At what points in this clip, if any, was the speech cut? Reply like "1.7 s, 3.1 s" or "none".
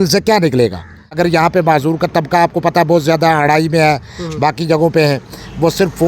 1.2 s